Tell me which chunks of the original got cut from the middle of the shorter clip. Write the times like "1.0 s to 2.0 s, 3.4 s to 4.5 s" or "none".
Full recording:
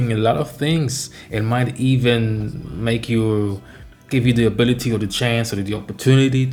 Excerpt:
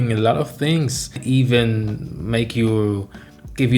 1.2 s to 1.7 s